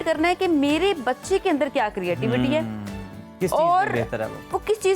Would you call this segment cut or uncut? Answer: uncut